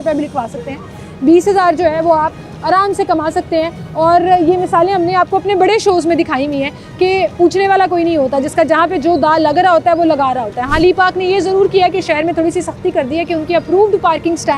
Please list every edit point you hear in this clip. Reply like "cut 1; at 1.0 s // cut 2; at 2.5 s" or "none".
none